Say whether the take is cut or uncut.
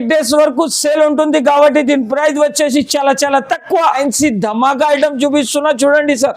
cut